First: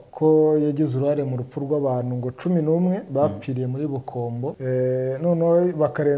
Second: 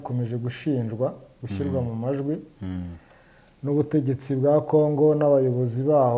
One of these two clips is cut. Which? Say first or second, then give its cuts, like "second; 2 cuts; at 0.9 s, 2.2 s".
first; 1 cut; at 4.6 s